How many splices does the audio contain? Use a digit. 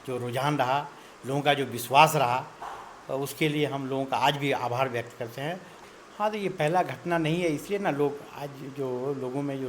1